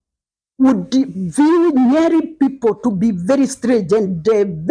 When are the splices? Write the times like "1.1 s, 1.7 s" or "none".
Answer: none